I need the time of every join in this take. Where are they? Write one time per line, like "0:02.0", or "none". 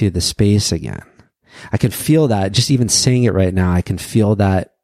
none